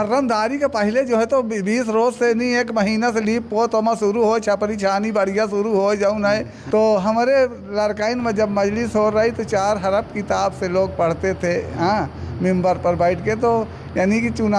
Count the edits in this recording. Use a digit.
1